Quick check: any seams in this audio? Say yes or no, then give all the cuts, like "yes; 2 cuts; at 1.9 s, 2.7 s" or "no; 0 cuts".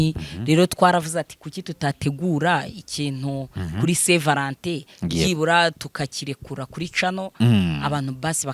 no; 0 cuts